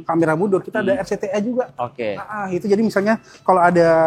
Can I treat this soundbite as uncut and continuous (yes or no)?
yes